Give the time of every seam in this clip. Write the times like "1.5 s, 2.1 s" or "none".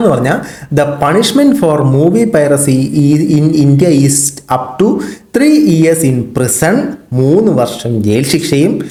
none